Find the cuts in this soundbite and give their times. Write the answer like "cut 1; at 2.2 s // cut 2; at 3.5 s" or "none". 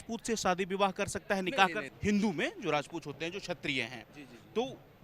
cut 1; at 1.9 s

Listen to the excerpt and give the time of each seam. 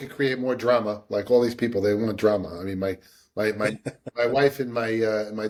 none

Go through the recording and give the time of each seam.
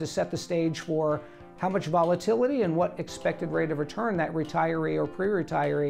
none

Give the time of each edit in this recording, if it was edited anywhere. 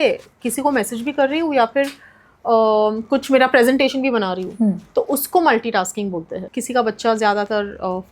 cut 1; at 6.5 s

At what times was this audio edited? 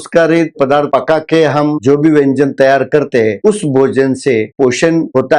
cut 1; at 0.8 s // cut 2; at 1.8 s // cut 3; at 4.5 s

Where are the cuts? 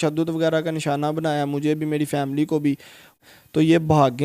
cut 1; at 3.2 s

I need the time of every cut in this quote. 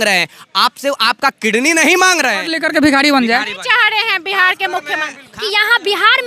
cut 1; at 2.5 s // cut 2; at 5.3 s

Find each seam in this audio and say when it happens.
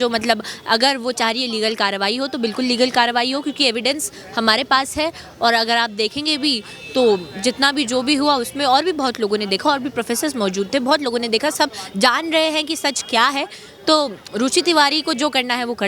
none

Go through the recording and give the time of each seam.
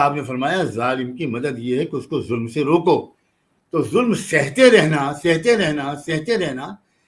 none

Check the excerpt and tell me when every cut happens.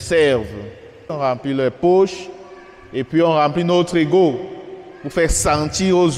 cut 1; at 1.1 s

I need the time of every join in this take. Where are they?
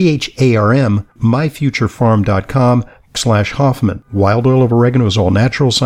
cut 1; at 1.2 s // cut 2; at 3.0 s

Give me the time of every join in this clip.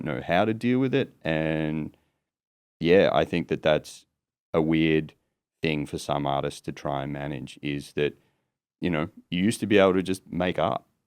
none

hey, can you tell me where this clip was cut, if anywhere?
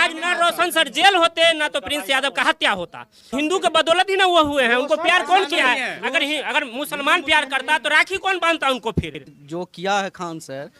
cut 1; at 3.3 s // cut 2; at 9.4 s

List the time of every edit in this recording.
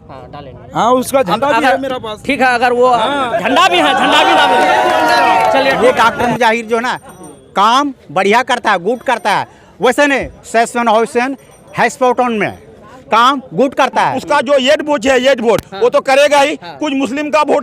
cut 1; at 5.8 s // cut 2; at 14.1 s

